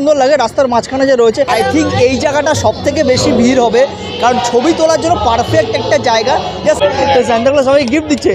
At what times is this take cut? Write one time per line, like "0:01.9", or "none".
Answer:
0:01.5
0:06.8